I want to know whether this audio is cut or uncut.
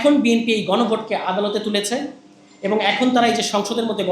uncut